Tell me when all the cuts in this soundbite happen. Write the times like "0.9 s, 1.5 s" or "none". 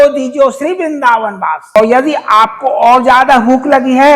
1.8 s